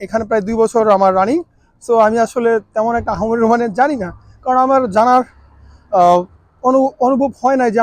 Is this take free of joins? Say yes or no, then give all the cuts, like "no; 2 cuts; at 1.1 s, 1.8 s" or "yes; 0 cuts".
yes; 0 cuts